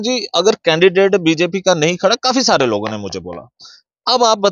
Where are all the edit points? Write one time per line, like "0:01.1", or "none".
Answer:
none